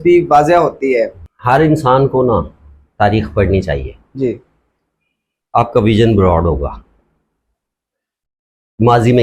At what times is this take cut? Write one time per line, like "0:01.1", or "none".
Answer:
0:01.3